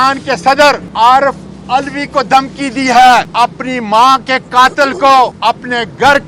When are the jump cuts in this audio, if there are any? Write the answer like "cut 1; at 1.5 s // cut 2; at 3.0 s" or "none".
cut 1; at 0.9 s // cut 2; at 3.3 s // cut 3; at 5.4 s

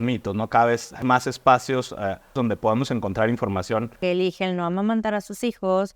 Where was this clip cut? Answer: cut 1; at 1.0 s // cut 2; at 2.4 s // cut 3; at 4.0 s

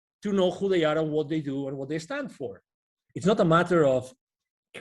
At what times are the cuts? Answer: cut 1; at 3.0 s

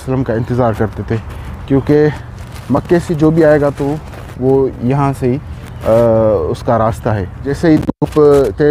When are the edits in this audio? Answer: cut 1; at 7.5 s

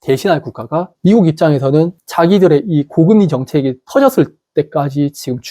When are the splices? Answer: cut 1; at 0.9 s

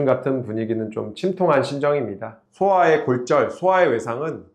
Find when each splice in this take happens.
cut 1; at 2.4 s

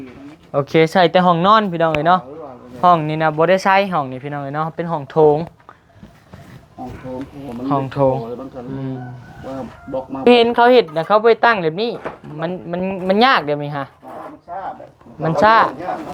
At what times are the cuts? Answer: cut 1; at 10.3 s

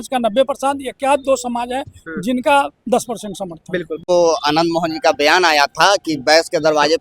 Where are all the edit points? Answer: cut 1; at 4.1 s

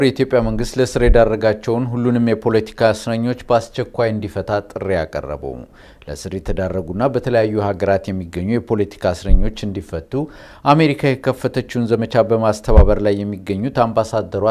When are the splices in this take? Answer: none

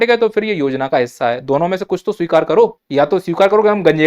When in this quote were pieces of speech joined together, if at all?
cut 1; at 2.8 s

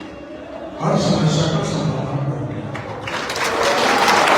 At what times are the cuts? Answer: none

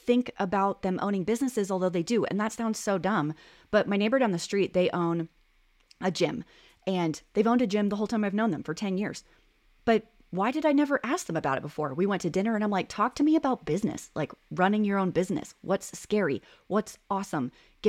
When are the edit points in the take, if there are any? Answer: none

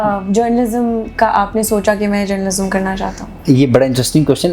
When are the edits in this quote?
none

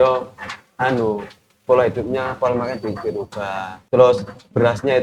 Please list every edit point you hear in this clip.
cut 1; at 3.8 s

